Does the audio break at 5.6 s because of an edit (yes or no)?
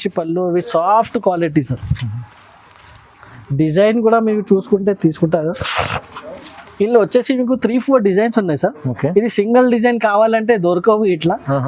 no